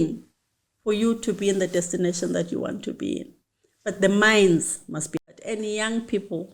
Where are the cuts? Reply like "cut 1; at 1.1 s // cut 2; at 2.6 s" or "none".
cut 1; at 5.2 s